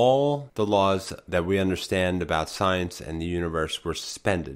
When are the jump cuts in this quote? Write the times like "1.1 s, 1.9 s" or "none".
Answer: none